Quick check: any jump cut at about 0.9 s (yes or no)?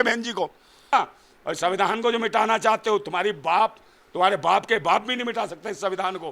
yes